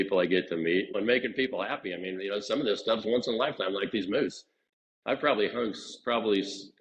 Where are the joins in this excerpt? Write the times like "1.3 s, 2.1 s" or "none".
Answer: 0.9 s